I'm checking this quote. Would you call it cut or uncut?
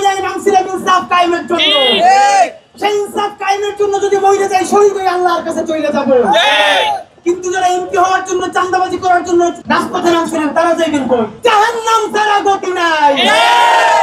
cut